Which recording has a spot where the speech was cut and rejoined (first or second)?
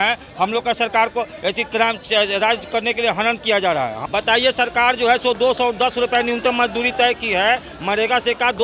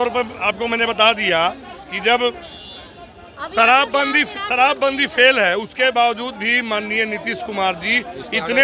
first